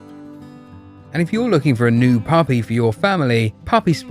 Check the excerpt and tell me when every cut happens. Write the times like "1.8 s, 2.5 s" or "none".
1.1 s